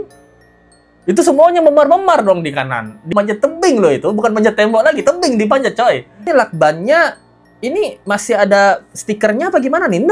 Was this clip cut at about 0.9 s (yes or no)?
no